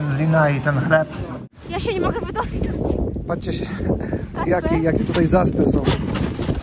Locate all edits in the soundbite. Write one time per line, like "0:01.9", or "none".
0:01.4